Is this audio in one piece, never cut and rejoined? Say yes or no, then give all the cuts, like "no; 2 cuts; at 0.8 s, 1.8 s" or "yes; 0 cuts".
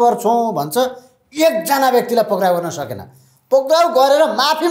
yes; 0 cuts